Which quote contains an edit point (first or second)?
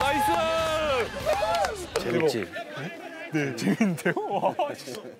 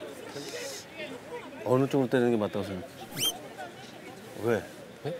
first